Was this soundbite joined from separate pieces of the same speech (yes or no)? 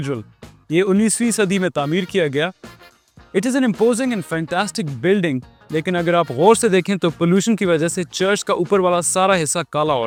no